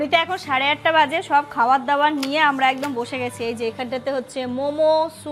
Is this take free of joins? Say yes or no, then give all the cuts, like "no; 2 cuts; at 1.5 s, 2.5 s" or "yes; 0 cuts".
yes; 0 cuts